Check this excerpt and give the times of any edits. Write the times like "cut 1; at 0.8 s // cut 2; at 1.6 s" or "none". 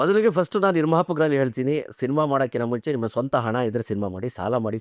none